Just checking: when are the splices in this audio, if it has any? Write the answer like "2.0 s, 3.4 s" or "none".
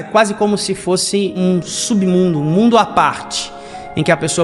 1.3 s